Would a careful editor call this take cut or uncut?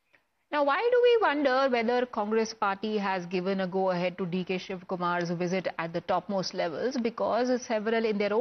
uncut